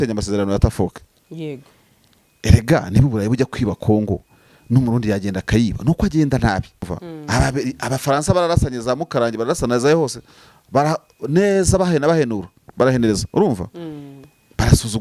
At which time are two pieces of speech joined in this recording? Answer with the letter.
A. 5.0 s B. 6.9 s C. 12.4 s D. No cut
B